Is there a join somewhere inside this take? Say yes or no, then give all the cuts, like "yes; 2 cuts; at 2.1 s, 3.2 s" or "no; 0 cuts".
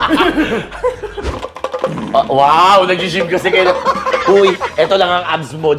yes; 1 cut; at 1.3 s